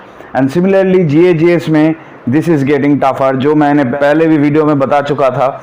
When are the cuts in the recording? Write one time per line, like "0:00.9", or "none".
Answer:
none

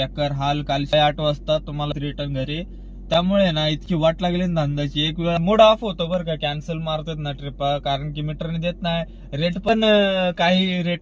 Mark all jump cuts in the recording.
0:00.9
0:01.9
0:05.4

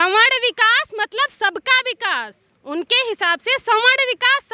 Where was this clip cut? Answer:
none

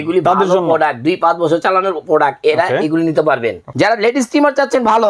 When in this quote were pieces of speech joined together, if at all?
0:03.6

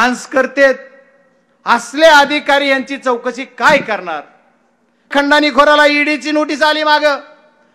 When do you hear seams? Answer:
0:05.1

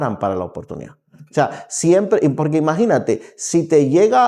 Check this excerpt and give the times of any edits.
none

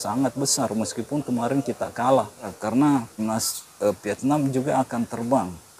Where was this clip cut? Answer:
0:02.6
0:03.2

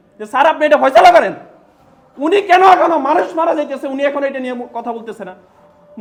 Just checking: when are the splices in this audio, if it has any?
none

